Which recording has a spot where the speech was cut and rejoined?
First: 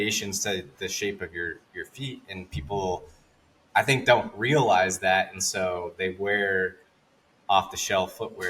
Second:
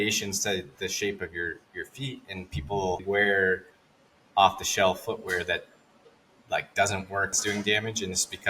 second; 2 cuts; at 3.0 s, 7.4 s

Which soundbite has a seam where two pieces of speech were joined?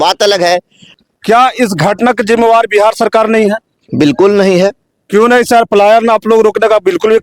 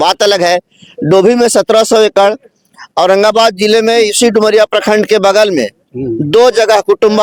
first; 1 cut; at 1.0 s

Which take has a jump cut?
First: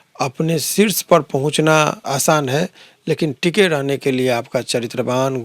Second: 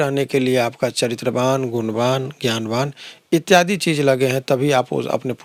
first; 1 cut; at 2.0 s

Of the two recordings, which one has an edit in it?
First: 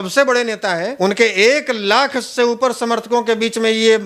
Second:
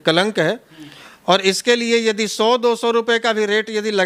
first; 1 cut; at 0.9 s

